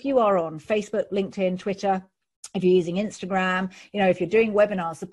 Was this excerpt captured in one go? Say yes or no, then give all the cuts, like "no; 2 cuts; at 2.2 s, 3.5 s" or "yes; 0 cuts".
yes; 0 cuts